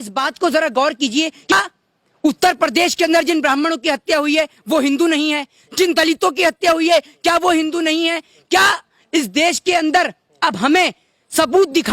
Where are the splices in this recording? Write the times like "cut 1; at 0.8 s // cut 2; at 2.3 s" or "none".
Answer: cut 1; at 1.5 s